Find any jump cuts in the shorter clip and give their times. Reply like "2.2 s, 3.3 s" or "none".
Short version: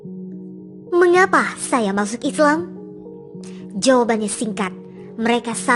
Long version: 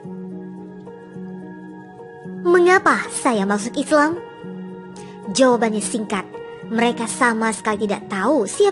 0.9 s

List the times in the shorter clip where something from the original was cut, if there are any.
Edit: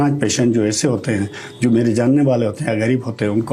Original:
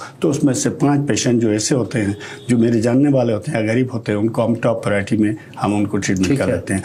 none

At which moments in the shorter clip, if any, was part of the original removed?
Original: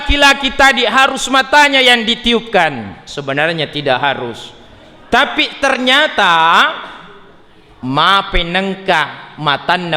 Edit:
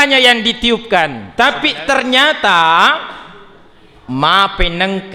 1.2 s

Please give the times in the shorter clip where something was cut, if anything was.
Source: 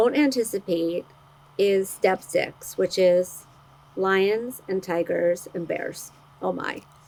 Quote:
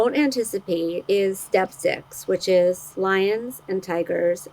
1.0 s, 2.9 s

